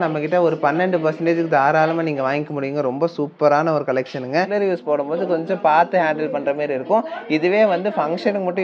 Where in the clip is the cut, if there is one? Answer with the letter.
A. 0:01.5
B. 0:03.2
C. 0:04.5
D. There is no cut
C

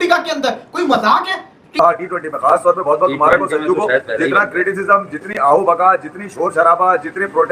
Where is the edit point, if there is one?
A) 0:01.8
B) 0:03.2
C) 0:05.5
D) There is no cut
A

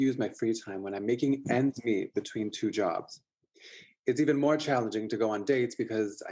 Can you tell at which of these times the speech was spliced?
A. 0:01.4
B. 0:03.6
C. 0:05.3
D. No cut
D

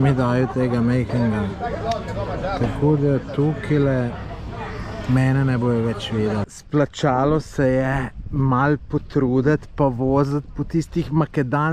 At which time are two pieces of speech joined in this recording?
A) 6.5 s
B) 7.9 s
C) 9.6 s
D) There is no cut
A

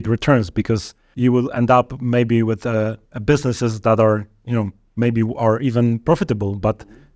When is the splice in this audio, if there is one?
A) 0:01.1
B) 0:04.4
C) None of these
A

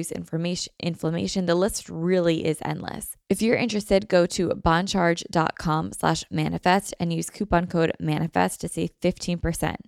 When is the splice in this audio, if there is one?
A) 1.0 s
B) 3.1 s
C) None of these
B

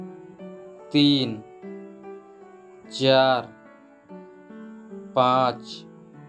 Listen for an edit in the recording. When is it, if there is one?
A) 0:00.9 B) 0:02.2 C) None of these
A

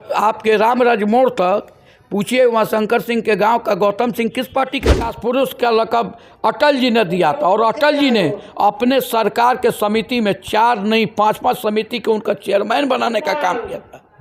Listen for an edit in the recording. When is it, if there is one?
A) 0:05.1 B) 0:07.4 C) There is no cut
A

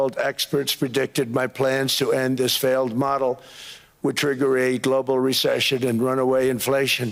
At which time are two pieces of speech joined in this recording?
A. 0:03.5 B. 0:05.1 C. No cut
C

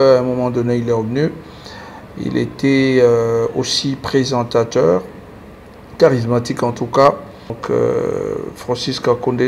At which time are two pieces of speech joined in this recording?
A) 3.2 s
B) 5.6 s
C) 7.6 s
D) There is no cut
C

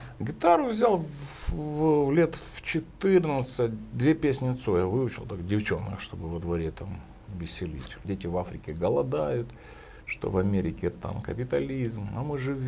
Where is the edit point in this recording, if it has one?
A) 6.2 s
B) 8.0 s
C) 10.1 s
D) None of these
B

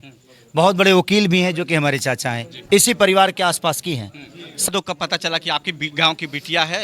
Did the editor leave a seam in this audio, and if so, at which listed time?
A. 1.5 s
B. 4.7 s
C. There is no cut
B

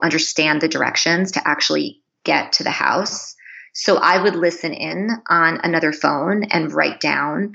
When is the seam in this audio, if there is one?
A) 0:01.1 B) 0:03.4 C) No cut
C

